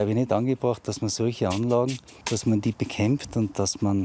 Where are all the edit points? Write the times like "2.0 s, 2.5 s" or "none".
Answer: 2.1 s

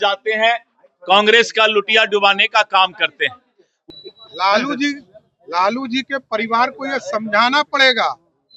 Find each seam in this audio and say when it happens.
3.8 s

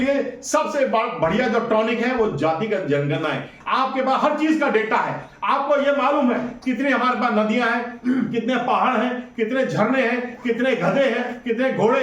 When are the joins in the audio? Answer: 3.5 s

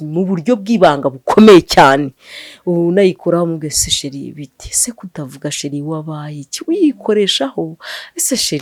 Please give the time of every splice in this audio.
none

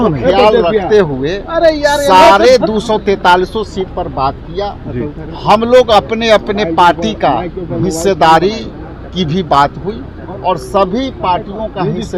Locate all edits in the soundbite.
none

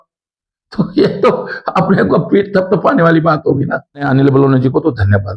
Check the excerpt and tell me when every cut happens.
4.0 s

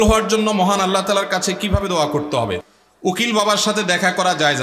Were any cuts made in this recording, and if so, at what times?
2.6 s

